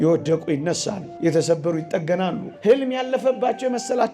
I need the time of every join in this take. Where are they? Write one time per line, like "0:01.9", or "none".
0:01.0
0:02.5